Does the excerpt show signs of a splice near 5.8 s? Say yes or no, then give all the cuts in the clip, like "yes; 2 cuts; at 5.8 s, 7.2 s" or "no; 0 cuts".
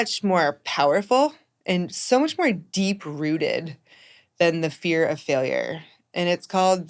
no; 0 cuts